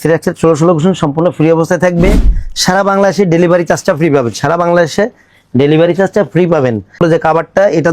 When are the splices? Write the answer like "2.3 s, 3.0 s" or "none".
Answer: 7.0 s

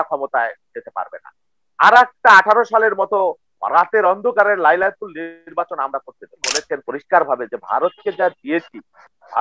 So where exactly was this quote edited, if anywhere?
6.6 s

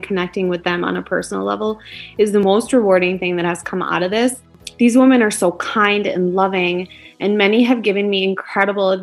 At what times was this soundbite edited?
2.4 s, 4.6 s

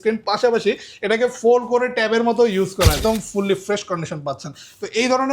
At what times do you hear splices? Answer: 3.0 s

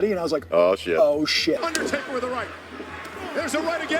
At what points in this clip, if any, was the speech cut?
1.6 s

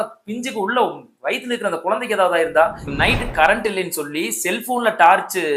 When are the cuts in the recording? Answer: 2.8 s

